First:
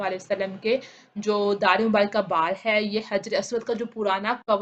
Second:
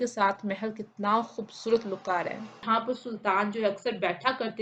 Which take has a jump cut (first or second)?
second